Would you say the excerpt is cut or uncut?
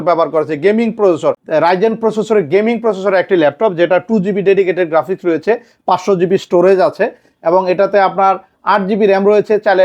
cut